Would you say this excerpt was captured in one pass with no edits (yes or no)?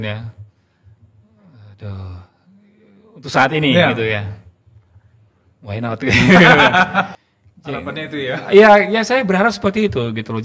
no